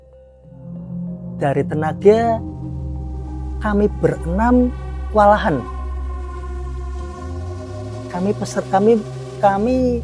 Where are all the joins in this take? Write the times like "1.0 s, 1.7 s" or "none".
none